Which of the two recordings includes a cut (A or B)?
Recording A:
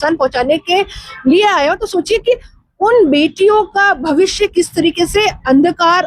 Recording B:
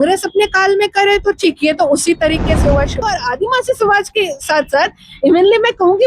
B